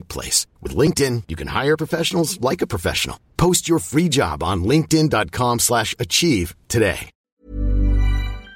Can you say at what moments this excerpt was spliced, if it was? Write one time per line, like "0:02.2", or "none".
0:07.3